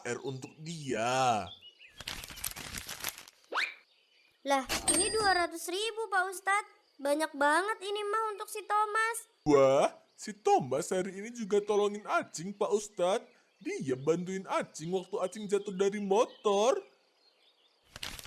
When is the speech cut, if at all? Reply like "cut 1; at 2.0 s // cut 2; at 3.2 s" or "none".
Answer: cut 1; at 9.4 s